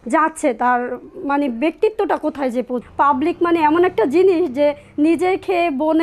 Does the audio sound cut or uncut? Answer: cut